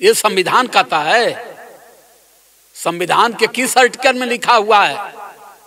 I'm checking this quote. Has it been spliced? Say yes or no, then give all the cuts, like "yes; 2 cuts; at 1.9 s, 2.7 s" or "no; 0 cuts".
no; 0 cuts